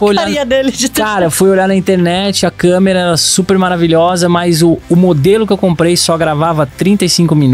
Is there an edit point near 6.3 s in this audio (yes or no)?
no